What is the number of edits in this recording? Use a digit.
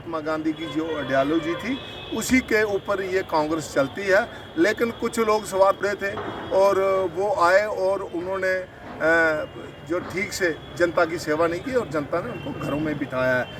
0